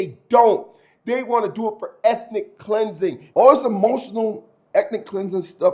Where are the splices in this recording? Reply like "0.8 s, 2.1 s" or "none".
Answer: 3.2 s